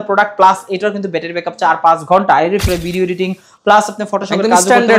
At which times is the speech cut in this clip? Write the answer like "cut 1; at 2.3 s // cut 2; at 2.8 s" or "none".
cut 1; at 2.6 s